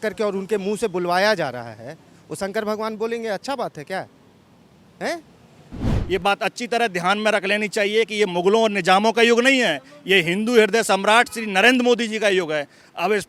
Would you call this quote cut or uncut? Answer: cut